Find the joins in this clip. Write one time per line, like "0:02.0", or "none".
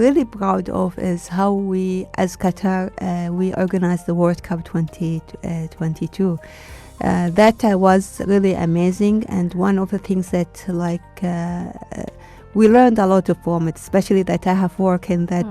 none